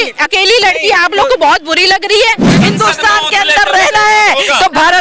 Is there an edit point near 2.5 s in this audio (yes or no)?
yes